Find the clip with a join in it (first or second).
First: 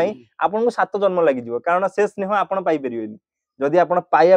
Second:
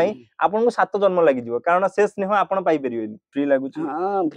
second